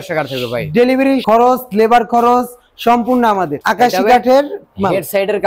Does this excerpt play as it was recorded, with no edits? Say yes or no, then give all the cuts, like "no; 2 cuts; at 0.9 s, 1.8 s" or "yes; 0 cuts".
no; 1 cut; at 3.6 s